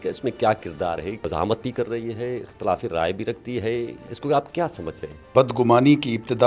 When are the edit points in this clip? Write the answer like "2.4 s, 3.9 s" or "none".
1.2 s, 4.1 s, 5.3 s